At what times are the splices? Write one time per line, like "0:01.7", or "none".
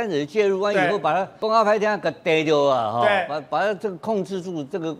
0:01.3

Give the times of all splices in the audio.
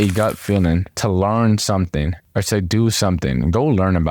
0:00.9

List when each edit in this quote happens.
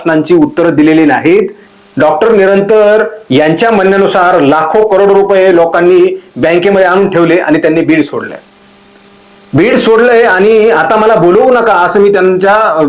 0:01.6

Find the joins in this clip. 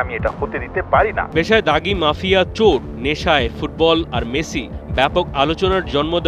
0:01.3

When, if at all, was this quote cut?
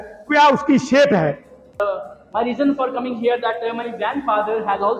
0:01.8

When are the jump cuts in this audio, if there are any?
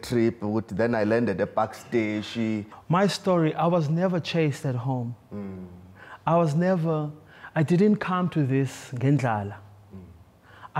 0:02.7

